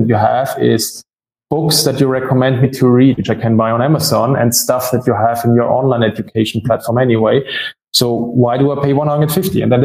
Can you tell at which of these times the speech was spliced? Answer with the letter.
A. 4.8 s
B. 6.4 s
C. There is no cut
C